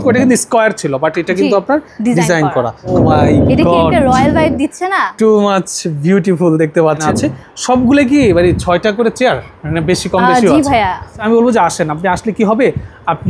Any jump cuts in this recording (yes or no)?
yes